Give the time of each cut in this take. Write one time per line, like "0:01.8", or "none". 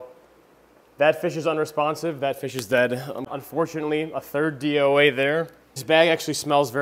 0:03.3
0:05.8